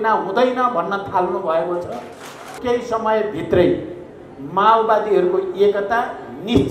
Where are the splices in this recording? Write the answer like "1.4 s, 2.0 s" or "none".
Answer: 2.5 s